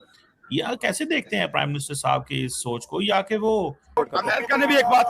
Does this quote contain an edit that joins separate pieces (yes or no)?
yes